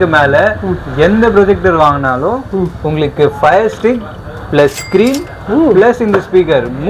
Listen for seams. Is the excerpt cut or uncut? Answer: uncut